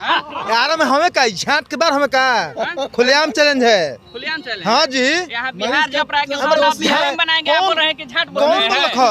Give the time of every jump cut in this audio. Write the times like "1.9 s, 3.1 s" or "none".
7.0 s